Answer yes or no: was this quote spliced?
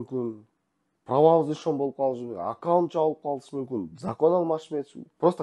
no